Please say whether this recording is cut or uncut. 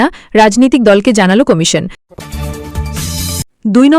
cut